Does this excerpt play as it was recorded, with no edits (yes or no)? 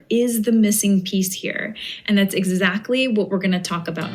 yes